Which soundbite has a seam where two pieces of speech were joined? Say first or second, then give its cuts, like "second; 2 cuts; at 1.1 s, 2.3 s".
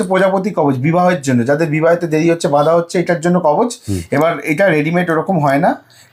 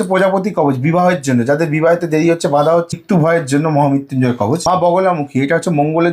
second; 2 cuts; at 2.9 s, 4.6 s